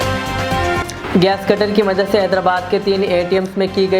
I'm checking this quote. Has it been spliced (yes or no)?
yes